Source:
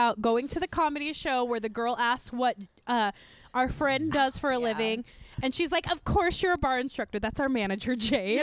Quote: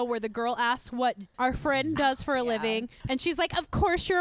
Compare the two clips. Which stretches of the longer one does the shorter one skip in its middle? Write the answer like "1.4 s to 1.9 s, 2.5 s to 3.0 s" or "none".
2.7 s to 3.4 s, 5.1 s to 5.3 s